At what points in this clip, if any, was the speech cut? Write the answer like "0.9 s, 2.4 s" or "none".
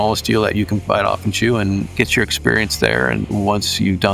0.8 s, 1.9 s, 3.2 s